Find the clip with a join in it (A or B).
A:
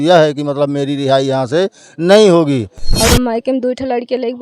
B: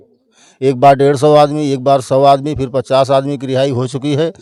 A